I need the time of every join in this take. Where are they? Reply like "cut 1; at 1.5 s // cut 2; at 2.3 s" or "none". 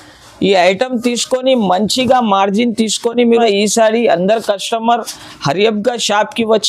cut 1; at 3.4 s